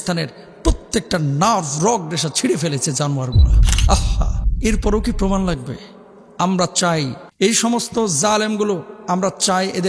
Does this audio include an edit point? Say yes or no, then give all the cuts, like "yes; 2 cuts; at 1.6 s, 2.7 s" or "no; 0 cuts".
yes; 1 cut; at 7.2 s